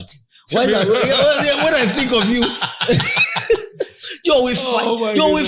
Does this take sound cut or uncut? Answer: uncut